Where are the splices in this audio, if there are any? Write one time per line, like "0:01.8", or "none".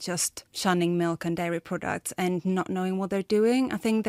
none